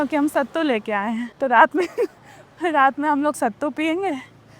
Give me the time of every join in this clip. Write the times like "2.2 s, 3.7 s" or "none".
1.3 s